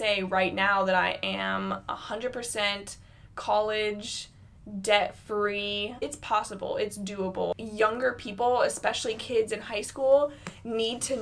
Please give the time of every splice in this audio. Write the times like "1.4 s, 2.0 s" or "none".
6.1 s, 7.5 s